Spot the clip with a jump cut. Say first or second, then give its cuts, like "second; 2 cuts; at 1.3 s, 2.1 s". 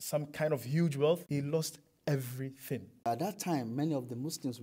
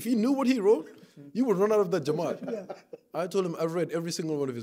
first; 2 cuts; at 1.2 s, 3.1 s